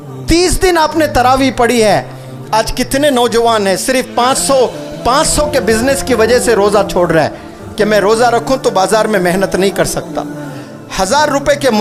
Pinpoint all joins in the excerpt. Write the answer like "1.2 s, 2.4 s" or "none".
none